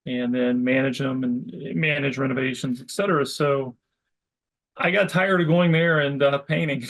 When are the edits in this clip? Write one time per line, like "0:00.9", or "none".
none